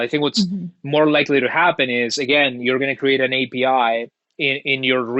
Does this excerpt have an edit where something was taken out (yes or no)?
no